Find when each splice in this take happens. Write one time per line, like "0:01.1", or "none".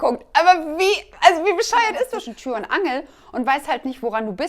0:02.3